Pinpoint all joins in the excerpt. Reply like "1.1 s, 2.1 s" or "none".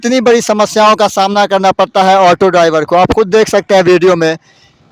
none